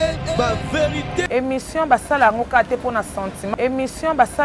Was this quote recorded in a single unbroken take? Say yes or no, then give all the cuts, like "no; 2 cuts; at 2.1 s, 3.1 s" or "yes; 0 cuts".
yes; 0 cuts